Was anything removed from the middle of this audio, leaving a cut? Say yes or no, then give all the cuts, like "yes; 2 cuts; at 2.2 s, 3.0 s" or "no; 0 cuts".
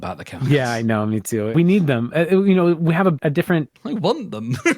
yes; 2 cuts; at 1.5 s, 3.1 s